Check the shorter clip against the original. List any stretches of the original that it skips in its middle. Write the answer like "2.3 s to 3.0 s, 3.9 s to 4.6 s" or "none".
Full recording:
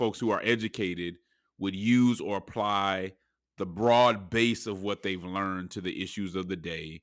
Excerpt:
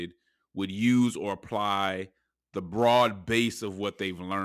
none